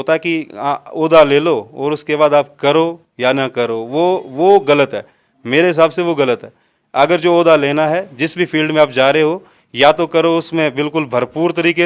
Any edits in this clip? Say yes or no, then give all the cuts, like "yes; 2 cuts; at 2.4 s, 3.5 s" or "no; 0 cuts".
no; 0 cuts